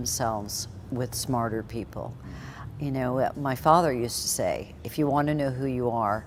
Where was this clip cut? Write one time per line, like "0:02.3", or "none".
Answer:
none